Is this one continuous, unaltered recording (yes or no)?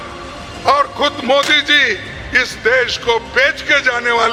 yes